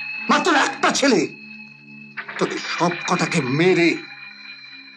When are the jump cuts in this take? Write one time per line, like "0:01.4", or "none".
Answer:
none